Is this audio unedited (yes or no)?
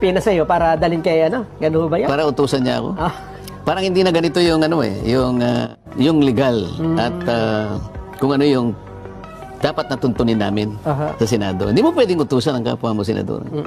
no